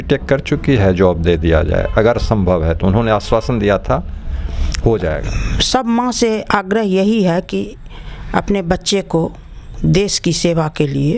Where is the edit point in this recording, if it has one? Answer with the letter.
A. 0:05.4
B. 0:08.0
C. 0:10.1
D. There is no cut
A